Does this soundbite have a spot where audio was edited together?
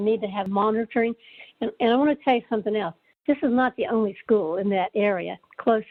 no; 0 cuts

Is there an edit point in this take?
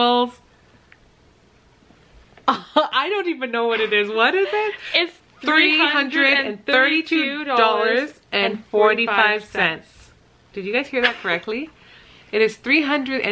no; 0 cuts

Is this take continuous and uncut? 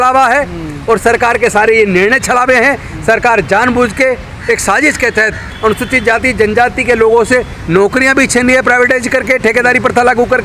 yes; 0 cuts

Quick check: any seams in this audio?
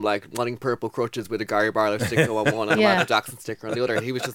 no; 0 cuts

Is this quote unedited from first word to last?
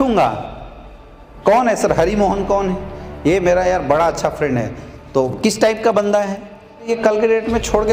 no; 1 cut; at 6.9 s

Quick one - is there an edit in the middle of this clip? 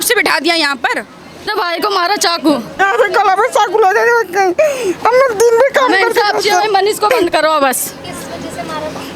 yes; 1 cut; at 1.5 s

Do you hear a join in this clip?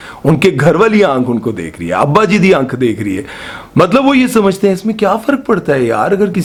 no; 0 cuts

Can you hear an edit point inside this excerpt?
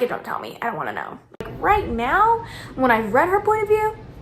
yes; 1 cut; at 1.4 s

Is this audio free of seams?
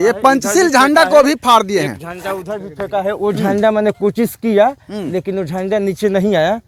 yes; 0 cuts

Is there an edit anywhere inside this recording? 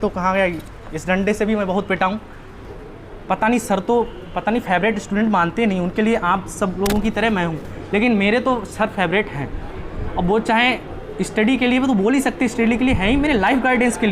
yes; 1 cut; at 2.7 s

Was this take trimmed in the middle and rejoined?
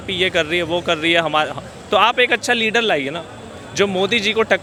no; 0 cuts

